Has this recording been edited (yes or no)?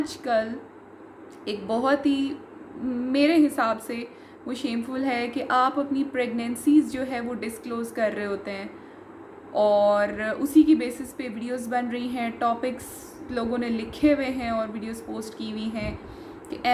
no